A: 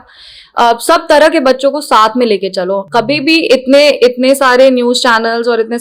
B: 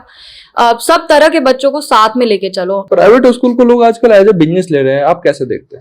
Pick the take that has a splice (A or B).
B